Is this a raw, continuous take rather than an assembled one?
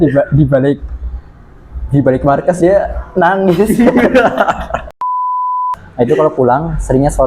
no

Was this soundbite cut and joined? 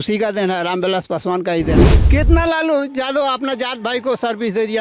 yes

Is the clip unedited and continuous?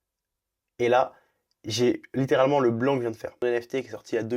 no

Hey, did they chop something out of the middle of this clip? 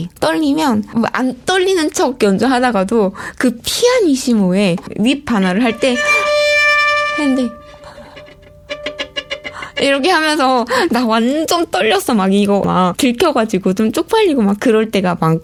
no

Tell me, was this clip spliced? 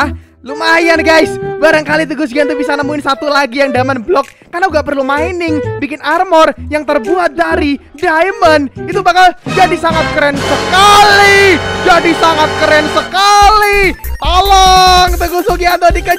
yes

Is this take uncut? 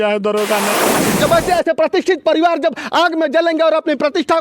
no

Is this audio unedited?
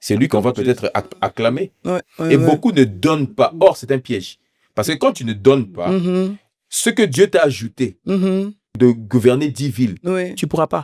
no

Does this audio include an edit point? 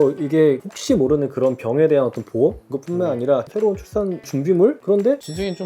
yes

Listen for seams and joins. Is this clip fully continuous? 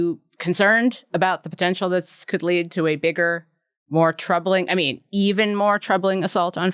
yes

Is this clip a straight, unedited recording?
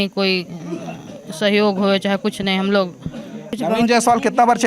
no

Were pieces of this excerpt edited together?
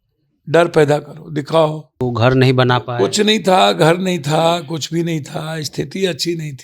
yes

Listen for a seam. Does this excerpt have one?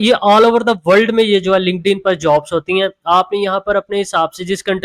no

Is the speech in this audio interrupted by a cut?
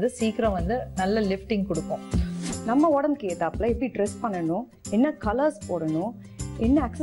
yes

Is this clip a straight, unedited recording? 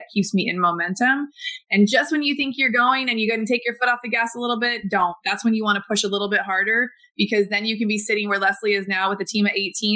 yes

